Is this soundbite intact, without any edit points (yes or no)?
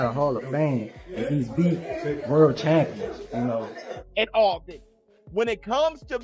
no